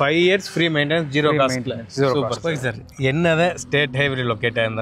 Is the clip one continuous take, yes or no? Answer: no